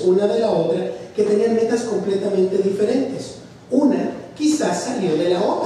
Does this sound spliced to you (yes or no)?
no